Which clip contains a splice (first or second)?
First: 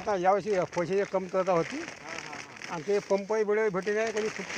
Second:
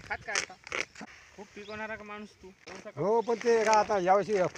second